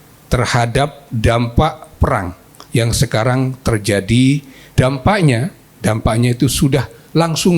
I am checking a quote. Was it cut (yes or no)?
yes